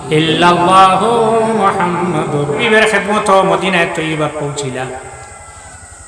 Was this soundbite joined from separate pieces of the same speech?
yes; 1 cut; at 2.6 s

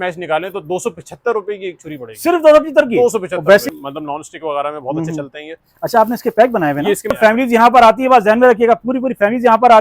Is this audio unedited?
no; 2 cuts; at 3.6 s, 7.2 s

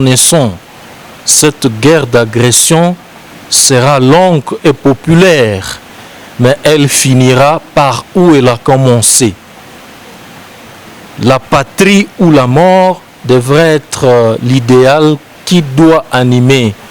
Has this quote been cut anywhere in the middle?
no; 0 cuts

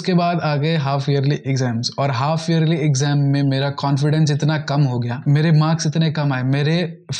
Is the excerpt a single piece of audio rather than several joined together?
yes; 0 cuts

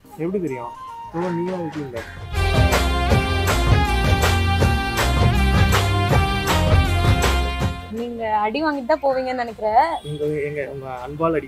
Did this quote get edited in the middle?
no; 0 cuts

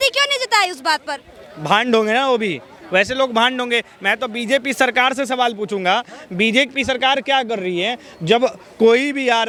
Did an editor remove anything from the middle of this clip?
no; 0 cuts

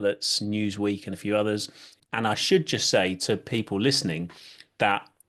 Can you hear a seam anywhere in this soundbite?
yes; 1 cut; at 2.0 s

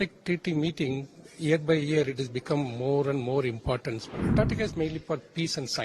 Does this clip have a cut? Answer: yes; 1 cut; at 4.2 s

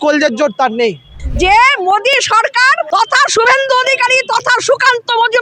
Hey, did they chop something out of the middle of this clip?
yes; 2 cuts; at 1.1 s, 2.8 s

